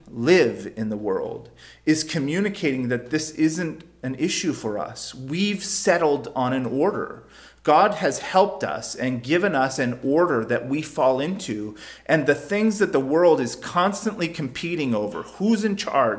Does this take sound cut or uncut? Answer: uncut